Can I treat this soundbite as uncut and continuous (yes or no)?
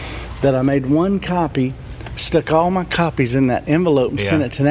yes